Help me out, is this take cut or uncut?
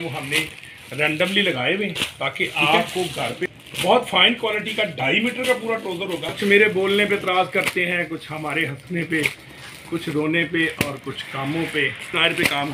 cut